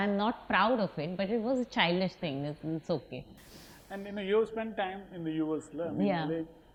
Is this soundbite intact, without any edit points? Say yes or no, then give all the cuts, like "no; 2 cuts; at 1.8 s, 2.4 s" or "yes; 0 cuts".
yes; 0 cuts